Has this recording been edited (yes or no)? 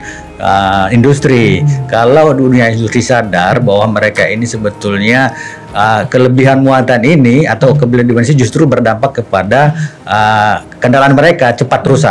no